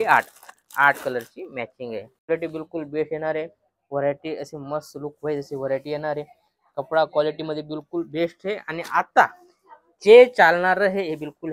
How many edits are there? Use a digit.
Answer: 1